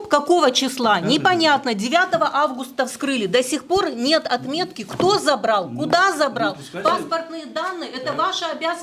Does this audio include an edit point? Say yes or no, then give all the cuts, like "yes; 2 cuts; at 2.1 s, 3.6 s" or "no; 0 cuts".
no; 0 cuts